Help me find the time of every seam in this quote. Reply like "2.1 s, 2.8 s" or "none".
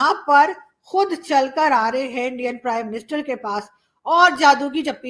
none